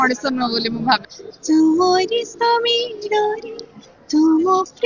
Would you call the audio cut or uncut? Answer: cut